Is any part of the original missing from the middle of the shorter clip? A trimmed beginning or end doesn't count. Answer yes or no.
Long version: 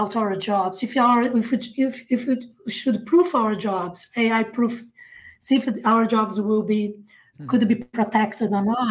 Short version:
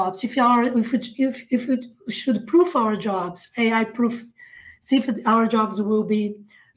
no